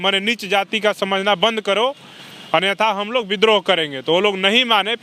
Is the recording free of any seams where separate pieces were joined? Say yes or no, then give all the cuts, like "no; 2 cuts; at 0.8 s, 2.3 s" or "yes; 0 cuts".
yes; 0 cuts